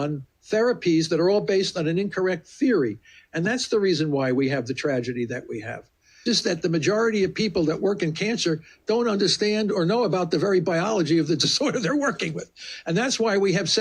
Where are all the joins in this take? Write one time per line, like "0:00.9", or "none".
0:06.2